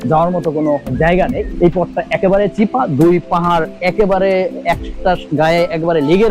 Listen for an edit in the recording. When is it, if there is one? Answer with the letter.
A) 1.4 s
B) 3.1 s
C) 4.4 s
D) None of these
A